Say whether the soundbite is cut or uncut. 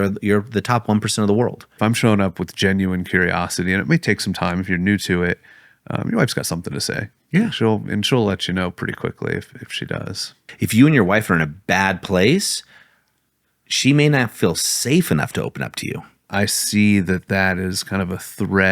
cut